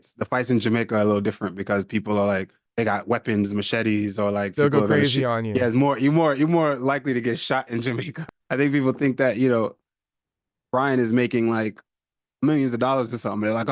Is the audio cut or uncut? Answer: cut